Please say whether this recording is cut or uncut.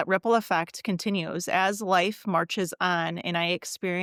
uncut